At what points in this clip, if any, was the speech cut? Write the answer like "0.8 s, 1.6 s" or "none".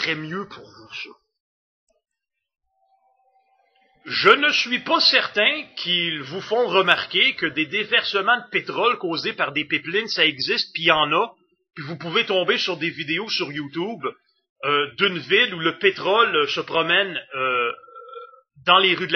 15.5 s